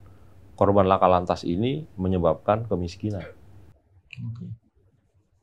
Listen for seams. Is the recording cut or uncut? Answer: uncut